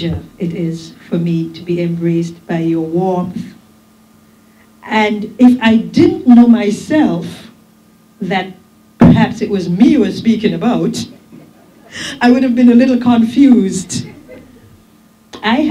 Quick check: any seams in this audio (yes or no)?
no